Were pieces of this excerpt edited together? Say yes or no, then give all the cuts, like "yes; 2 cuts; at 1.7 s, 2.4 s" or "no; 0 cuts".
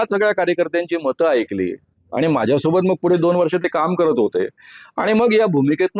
no; 0 cuts